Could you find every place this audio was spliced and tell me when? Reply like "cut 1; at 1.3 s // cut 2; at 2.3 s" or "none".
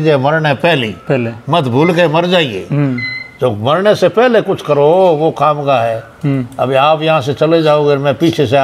none